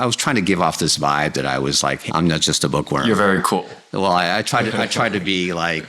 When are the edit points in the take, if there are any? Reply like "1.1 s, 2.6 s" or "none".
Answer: 2.0 s